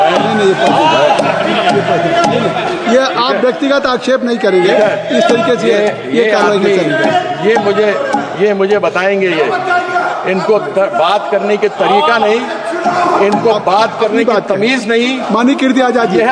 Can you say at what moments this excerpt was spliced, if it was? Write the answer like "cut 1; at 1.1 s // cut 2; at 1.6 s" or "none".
none